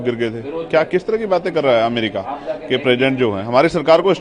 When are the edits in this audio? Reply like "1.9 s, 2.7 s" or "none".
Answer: none